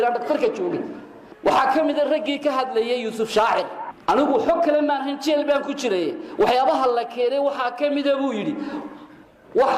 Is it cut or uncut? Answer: uncut